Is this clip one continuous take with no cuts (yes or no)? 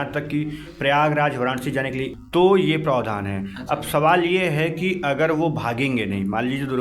no